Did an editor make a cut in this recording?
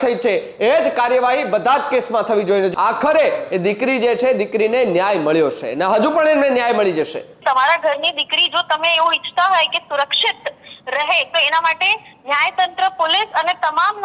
yes; 2 cuts; at 2.7 s, 7.3 s

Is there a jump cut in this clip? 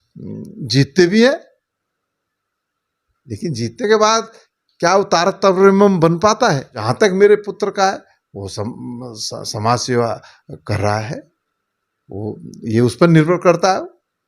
yes; 1 cut; at 6.8 s

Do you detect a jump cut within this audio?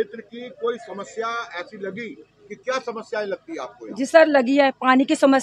no; 0 cuts

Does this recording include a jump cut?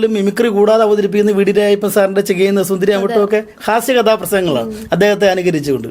no; 0 cuts

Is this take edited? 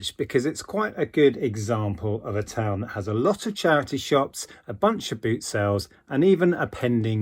no; 0 cuts

